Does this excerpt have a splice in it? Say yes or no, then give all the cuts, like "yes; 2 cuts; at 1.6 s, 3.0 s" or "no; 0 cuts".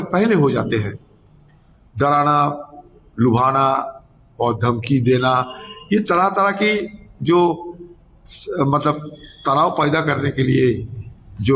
no; 0 cuts